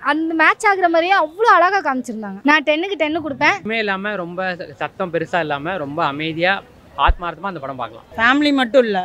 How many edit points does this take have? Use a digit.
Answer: 3